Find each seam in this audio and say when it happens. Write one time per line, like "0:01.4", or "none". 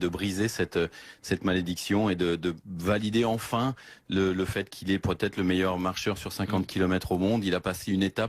0:01.0